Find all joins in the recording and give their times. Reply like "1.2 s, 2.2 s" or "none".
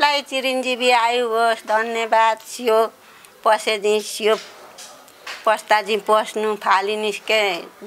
none

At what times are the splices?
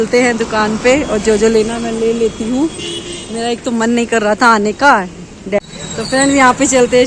5.6 s

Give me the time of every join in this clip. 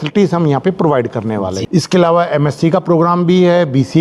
1.6 s

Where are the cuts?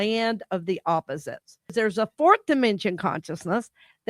1.7 s

